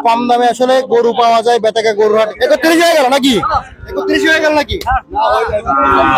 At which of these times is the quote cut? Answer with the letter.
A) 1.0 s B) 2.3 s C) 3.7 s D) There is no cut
B